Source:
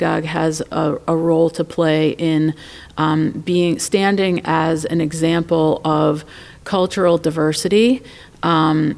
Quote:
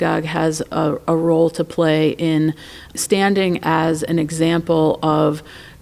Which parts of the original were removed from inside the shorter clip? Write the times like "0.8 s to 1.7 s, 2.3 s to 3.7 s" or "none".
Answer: 3.0 s to 3.8 s